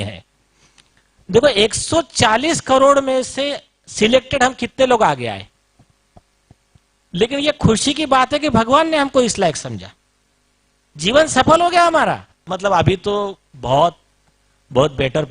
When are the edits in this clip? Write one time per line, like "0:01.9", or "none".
0:12.5